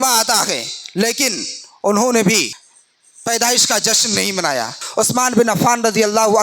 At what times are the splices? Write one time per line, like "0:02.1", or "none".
0:02.6
0:04.8